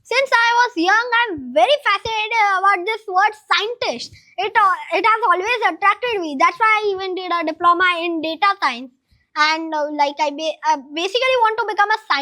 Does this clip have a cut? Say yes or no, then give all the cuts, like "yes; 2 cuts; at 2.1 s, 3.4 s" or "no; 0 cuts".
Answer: no; 0 cuts